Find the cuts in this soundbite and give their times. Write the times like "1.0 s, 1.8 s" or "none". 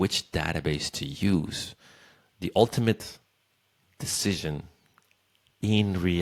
none